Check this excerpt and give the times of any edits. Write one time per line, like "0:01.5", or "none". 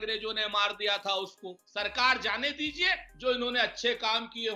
0:01.5